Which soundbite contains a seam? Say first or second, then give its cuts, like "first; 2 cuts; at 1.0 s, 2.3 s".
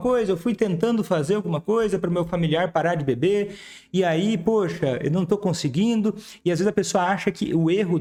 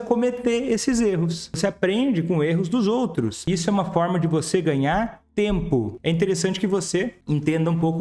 second; 5 cuts; at 1.4 s, 3.4 s, 5.2 s, 5.9 s, 7.2 s